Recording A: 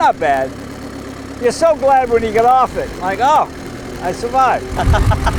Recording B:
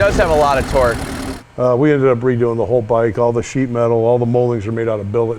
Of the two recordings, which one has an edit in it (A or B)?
B